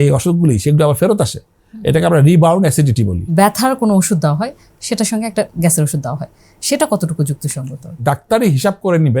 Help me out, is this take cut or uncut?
cut